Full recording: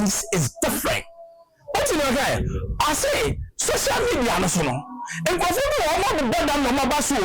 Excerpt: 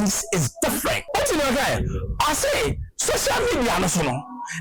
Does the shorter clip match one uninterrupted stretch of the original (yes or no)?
no